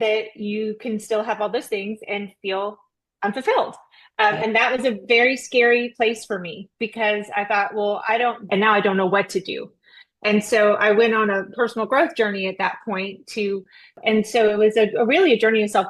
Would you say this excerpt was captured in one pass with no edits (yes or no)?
no